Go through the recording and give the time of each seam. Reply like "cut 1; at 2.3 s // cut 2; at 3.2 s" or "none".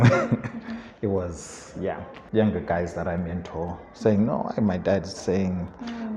cut 1; at 2.1 s